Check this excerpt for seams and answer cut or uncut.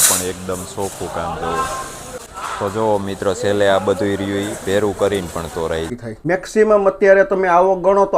cut